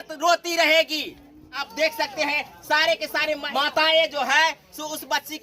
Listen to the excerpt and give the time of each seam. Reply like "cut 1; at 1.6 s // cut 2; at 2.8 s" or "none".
cut 1; at 1.7 s // cut 2; at 3.4 s